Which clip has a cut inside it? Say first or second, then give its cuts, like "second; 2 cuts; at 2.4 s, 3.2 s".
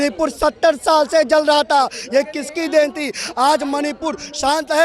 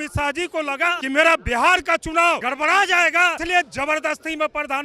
second; 3 cuts; at 1.0 s, 2.4 s, 3.4 s